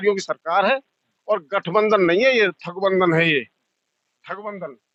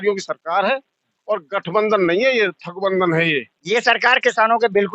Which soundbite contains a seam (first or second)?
second